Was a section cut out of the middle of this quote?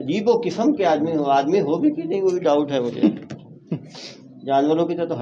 no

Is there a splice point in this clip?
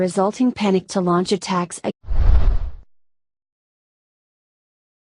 no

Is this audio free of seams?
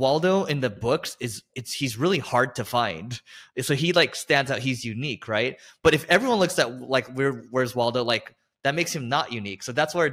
yes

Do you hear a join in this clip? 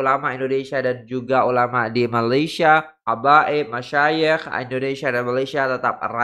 no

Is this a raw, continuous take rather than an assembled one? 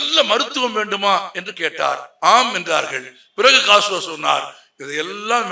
no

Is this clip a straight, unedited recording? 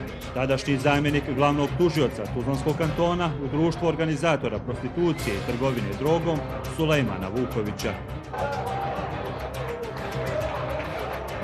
yes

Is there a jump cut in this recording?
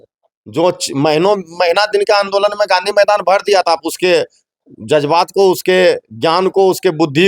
no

